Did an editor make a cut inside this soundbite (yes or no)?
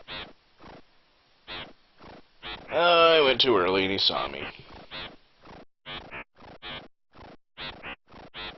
yes